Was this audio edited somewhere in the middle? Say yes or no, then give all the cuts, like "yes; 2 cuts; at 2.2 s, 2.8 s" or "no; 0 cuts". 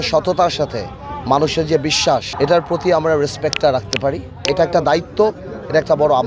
yes; 1 cut; at 4.4 s